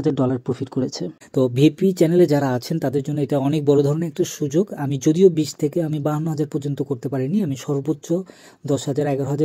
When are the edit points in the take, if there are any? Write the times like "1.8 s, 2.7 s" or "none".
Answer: 1.0 s